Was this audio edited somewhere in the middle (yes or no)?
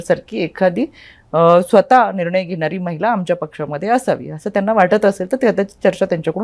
no